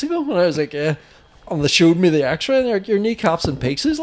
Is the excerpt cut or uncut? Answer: uncut